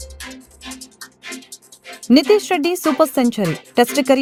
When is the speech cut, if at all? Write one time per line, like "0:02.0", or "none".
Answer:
none